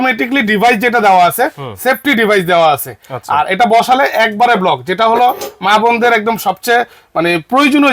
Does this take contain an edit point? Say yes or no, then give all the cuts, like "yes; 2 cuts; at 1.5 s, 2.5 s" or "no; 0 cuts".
no; 0 cuts